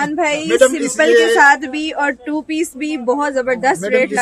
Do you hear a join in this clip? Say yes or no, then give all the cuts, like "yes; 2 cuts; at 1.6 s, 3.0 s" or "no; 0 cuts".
no; 0 cuts